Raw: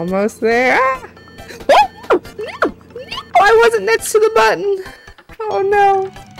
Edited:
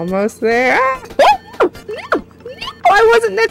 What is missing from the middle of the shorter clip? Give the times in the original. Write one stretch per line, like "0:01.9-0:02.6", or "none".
0:01.0-0:01.5